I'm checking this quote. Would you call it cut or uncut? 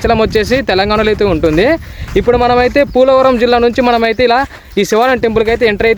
uncut